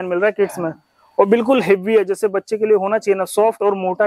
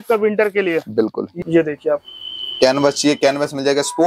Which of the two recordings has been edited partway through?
second; 1 cut; at 1.3 s

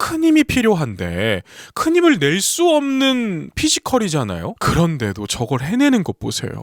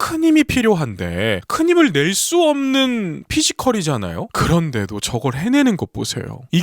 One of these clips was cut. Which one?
second; 1 cut; at 1.4 s

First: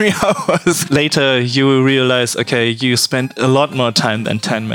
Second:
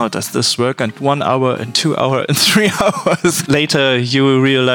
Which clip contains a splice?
second; 1 cut; at 0.9 s

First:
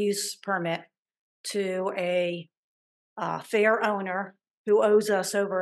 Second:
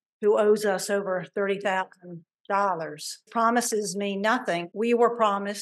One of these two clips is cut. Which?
second; 2 cuts; at 3.3 s, 4.7 s

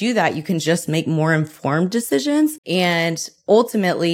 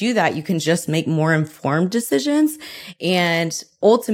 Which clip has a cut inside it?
first; 1 cut; at 2.6 s

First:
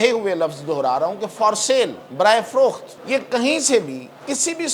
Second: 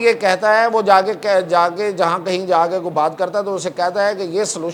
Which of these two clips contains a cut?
first; 2 cuts; at 2.0 s, 2.9 s

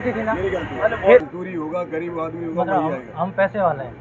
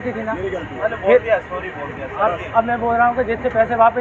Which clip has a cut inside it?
first; 1 cut; at 1.2 s

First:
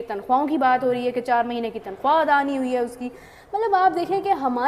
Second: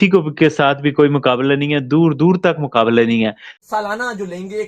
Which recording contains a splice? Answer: second; 1 cut; at 3.5 s

